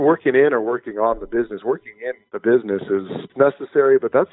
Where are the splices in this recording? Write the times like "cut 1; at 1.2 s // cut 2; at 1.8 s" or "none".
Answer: cut 1; at 3.3 s